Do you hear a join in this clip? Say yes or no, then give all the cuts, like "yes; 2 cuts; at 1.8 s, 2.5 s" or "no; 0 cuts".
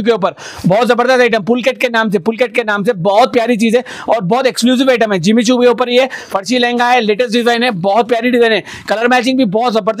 no; 0 cuts